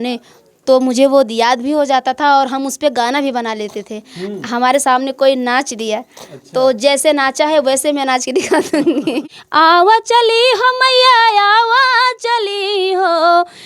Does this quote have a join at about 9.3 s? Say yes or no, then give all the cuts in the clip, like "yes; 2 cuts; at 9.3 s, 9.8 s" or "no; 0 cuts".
yes; 1 cut; at 9.3 s